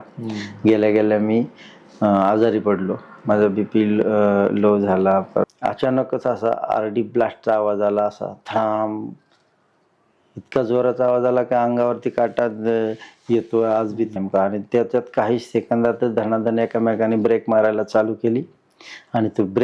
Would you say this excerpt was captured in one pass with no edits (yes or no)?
no